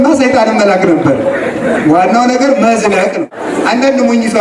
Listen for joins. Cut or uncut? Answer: cut